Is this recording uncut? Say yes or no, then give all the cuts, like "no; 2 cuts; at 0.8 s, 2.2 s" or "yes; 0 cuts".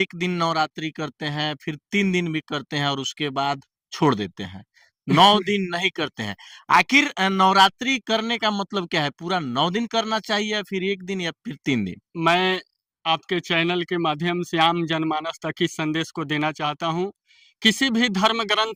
yes; 0 cuts